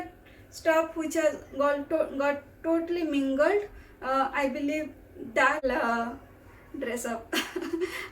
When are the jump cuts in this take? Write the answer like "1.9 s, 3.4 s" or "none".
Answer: 5.6 s